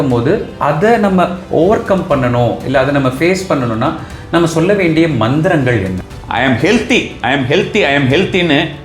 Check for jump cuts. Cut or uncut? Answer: cut